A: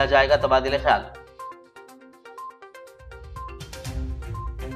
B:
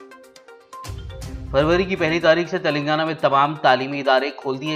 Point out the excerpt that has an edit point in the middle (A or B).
B